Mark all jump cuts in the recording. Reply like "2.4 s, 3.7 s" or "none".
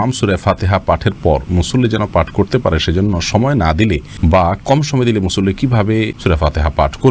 4.1 s, 6.2 s